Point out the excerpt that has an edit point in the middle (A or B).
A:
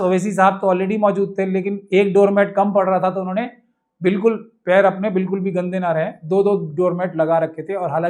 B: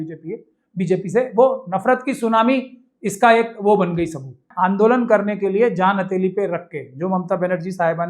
B